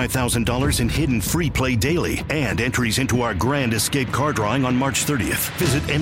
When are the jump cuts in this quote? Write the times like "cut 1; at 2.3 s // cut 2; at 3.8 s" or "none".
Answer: none